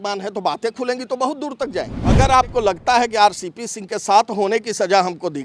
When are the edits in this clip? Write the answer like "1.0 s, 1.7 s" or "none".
2.0 s